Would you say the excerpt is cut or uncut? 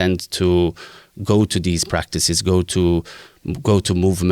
uncut